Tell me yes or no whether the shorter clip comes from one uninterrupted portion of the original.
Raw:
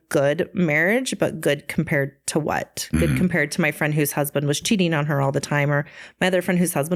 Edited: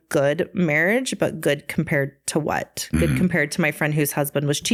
yes